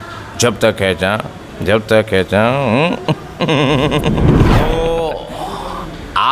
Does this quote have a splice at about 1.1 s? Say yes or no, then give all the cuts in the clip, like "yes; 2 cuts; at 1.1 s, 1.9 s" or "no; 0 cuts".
no; 1 cut; at 4.6 s